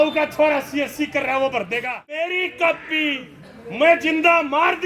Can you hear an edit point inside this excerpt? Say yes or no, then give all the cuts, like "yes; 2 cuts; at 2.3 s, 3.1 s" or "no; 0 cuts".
yes; 1 cut; at 2.3 s